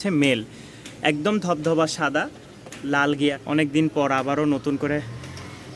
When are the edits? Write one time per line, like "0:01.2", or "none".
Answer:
0:03.3